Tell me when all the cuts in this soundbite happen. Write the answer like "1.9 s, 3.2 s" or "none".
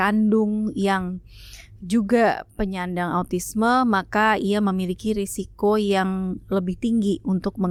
none